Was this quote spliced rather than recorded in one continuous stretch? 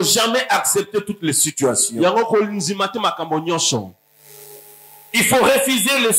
no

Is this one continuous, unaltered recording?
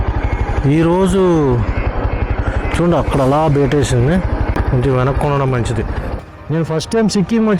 no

